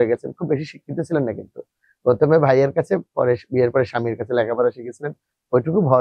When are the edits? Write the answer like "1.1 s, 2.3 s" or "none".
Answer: none